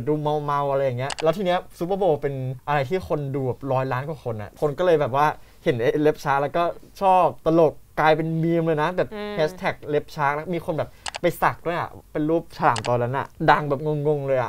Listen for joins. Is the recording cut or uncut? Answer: cut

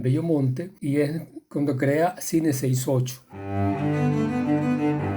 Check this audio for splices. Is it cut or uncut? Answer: cut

